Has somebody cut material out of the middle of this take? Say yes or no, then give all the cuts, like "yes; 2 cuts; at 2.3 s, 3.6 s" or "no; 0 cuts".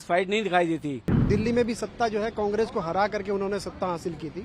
yes; 1 cut; at 1.1 s